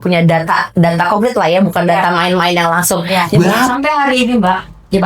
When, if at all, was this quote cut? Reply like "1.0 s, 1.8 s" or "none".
3.4 s